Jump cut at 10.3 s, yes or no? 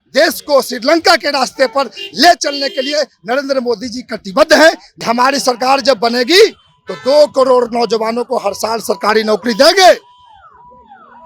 no